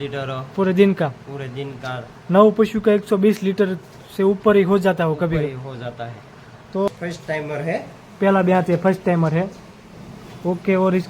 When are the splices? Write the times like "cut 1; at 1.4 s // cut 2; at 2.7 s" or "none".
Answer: cut 1; at 6.9 s